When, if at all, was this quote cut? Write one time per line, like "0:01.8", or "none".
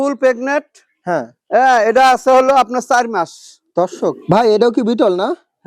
0:04.2